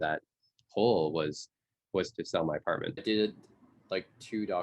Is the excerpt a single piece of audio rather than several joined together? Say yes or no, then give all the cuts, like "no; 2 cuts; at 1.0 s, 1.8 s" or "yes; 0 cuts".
no; 1 cut; at 2.9 s